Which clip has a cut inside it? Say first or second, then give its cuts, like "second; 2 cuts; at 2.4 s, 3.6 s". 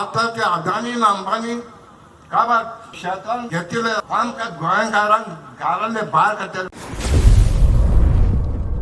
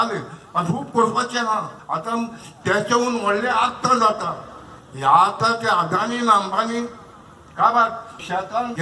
first; 1 cut; at 6.7 s